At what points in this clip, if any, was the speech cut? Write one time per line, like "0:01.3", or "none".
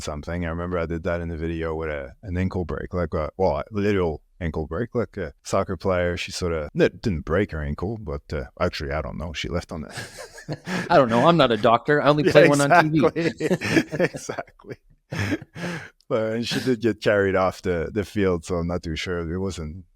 0:05.4
0:06.7